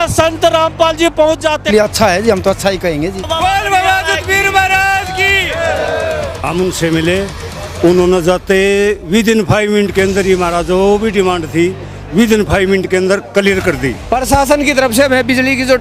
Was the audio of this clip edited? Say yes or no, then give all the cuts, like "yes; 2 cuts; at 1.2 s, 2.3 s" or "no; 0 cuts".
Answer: yes; 1 cut; at 1.7 s